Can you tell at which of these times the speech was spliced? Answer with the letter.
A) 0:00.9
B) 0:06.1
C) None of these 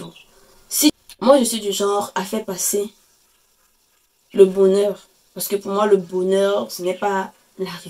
A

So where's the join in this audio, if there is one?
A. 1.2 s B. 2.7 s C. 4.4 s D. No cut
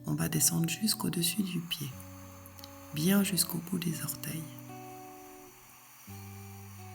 C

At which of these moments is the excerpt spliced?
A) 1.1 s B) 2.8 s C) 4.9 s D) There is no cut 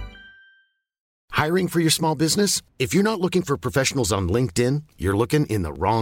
A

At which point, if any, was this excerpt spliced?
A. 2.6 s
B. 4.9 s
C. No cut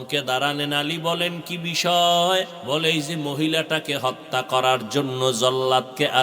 A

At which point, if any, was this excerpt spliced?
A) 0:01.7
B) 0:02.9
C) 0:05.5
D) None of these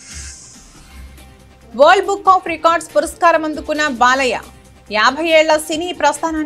A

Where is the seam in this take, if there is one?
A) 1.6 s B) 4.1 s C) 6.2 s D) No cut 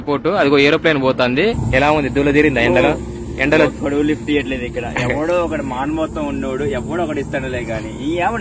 A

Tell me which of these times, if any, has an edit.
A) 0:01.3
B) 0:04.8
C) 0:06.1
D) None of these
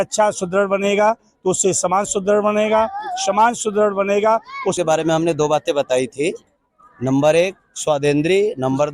B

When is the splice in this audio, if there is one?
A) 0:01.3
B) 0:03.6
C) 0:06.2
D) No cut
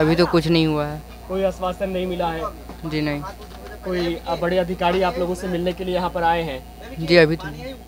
D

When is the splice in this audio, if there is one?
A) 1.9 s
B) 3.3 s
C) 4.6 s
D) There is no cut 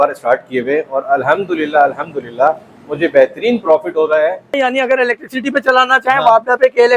C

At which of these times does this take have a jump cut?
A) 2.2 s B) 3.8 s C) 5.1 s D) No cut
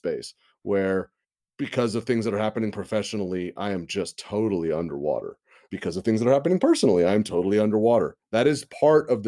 D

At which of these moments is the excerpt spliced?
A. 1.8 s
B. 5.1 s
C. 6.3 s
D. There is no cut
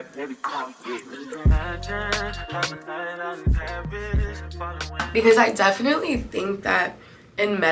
B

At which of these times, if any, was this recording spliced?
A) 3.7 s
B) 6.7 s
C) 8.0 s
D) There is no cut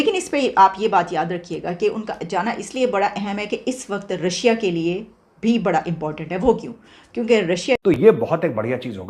C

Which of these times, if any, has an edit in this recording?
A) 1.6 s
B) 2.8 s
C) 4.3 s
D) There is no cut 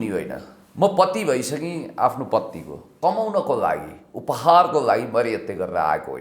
B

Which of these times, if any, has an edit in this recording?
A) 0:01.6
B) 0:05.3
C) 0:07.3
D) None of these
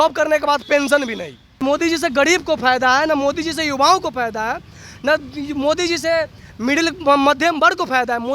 A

